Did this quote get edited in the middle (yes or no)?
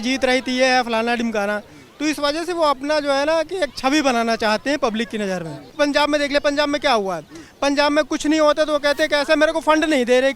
yes